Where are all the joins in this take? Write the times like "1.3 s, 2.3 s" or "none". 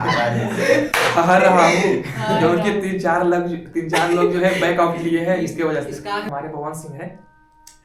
6.3 s